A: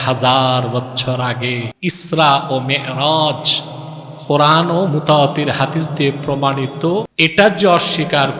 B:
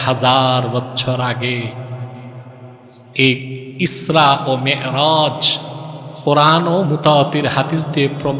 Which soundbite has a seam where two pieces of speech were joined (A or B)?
A